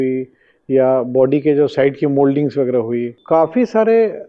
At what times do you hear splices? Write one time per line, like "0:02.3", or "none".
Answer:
0:03.2